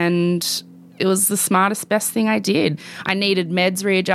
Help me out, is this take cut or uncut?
cut